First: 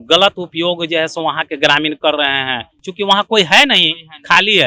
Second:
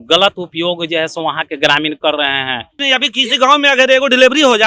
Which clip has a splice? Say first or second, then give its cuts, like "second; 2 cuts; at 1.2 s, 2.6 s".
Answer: second; 1 cut; at 2.8 s